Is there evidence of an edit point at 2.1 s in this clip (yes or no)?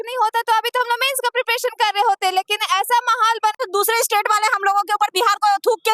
no